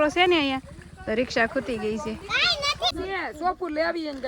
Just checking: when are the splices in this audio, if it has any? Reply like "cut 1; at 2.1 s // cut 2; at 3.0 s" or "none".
cut 1; at 3.0 s

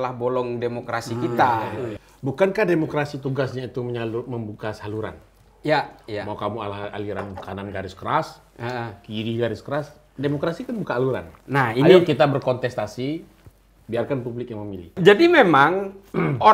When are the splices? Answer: cut 1; at 2.0 s // cut 2; at 14.9 s

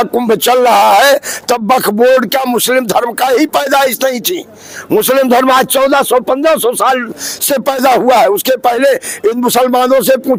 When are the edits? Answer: none

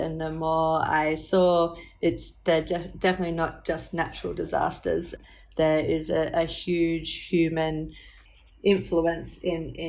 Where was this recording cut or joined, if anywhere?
cut 1; at 5.1 s // cut 2; at 8.1 s

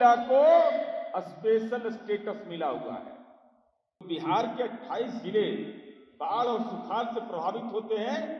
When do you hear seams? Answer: cut 1; at 4.0 s

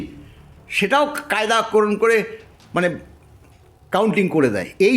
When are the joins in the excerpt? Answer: none

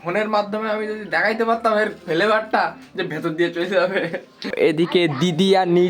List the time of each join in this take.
cut 1; at 4.5 s

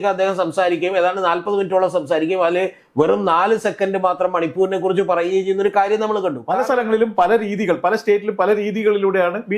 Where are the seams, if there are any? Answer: cut 1; at 6.4 s

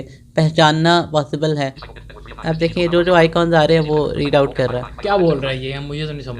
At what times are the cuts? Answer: cut 1; at 1.8 s

